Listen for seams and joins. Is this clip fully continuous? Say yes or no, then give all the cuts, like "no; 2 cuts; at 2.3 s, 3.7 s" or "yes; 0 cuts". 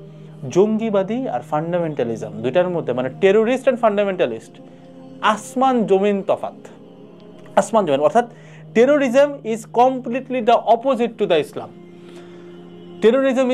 yes; 0 cuts